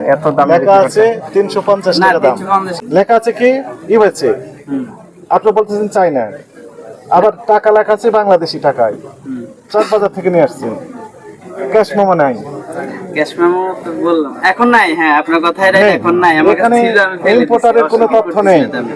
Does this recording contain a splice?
yes; 1 cut; at 2.8 s

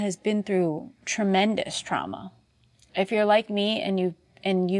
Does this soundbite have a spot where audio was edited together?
no; 0 cuts

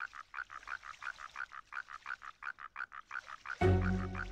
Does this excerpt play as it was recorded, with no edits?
yes; 0 cuts

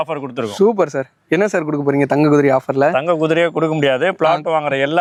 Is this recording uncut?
yes; 0 cuts

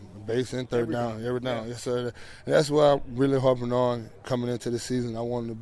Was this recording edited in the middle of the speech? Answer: no; 0 cuts

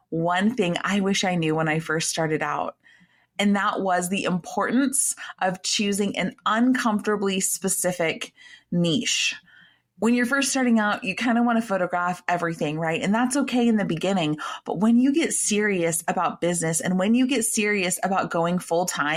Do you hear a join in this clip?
no; 0 cuts

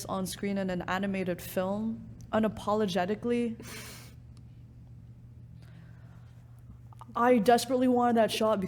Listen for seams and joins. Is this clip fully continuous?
yes; 0 cuts

